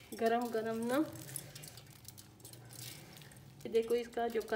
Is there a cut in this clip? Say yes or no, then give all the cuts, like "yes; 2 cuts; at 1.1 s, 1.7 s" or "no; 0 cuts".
yes; 1 cut; at 3.6 s